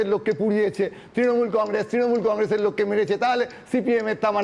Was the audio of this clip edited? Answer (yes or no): no